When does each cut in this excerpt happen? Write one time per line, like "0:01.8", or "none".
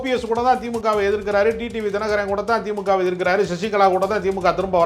none